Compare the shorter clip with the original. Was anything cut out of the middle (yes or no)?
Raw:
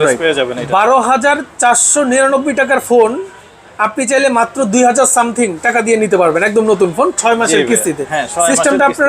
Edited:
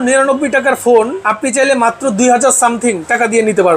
yes